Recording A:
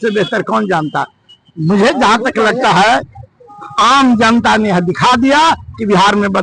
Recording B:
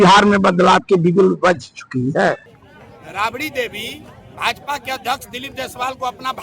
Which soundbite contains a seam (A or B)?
B